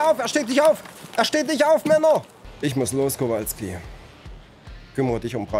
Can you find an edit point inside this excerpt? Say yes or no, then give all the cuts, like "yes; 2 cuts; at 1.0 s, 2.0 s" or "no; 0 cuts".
yes; 1 cut; at 2.4 s